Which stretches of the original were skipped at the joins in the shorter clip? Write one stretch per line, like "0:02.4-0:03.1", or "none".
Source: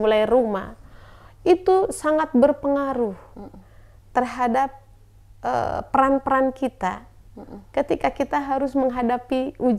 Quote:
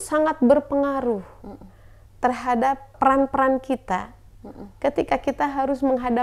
0:04.8-0:05.8